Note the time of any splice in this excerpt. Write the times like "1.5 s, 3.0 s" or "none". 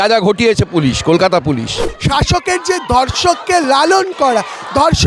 1.9 s